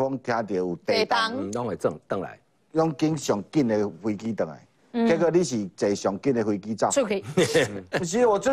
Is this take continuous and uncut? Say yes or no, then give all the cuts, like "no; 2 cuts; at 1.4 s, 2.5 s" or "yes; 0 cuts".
yes; 0 cuts